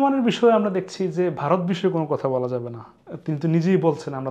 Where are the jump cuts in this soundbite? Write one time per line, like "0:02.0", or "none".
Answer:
none